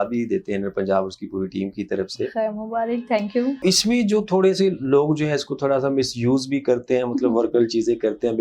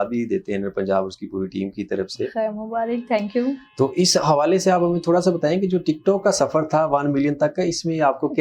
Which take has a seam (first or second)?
first